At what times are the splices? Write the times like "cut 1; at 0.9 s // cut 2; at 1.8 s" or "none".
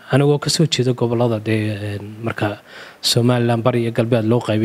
none